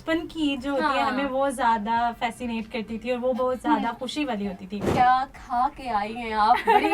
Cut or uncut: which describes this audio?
cut